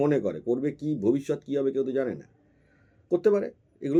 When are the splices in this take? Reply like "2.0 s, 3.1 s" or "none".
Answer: none